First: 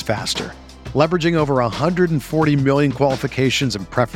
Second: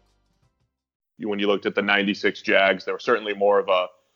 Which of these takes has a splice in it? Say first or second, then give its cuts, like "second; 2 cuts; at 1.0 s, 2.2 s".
second; 1 cut; at 1.1 s